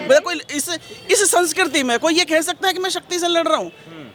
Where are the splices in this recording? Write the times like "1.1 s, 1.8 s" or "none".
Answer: none